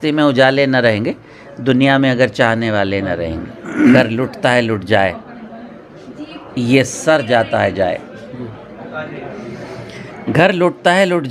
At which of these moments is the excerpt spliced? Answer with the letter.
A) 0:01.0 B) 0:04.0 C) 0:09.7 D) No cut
B